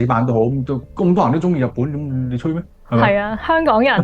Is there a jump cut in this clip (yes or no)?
no